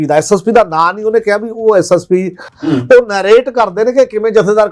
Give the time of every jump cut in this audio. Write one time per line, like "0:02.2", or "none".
0:02.5